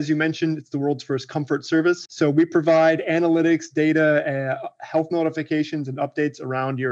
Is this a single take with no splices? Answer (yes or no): no